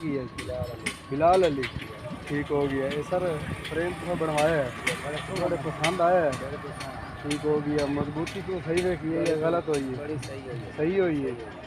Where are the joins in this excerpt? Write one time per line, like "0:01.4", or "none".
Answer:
none